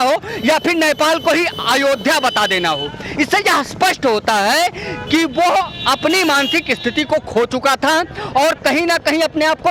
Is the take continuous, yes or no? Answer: yes